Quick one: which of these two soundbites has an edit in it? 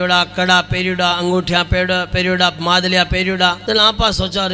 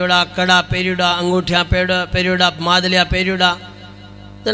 first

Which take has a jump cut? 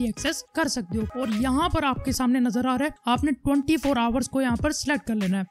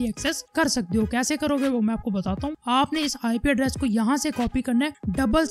first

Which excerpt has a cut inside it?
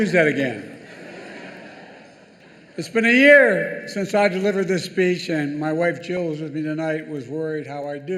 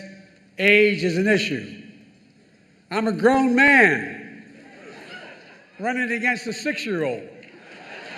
first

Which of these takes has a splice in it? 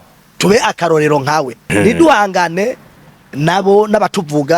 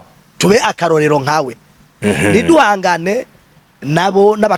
first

